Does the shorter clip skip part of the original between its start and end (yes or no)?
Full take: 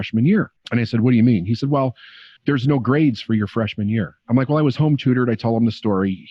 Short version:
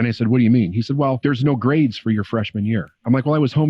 yes